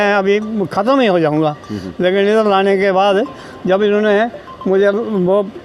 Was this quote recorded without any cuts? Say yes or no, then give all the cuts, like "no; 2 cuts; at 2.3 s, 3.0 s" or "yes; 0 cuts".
yes; 0 cuts